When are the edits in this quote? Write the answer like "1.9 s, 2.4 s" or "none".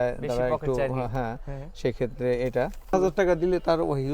2.9 s

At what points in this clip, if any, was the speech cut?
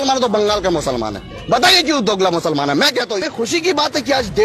3.3 s

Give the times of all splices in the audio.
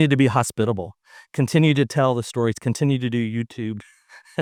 none

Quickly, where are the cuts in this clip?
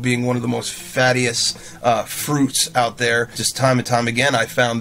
3.4 s

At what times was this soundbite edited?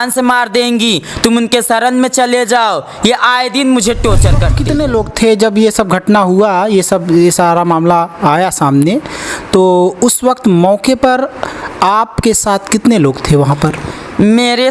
4.5 s

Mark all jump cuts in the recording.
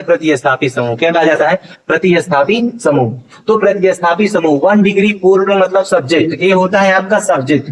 none

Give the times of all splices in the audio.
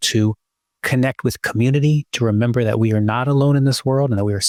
none

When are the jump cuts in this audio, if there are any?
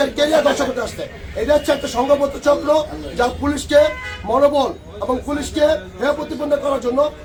none

